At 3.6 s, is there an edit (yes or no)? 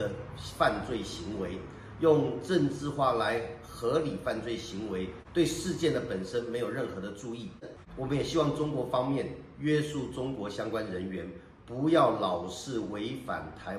no